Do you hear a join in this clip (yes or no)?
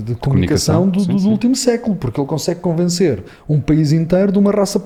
no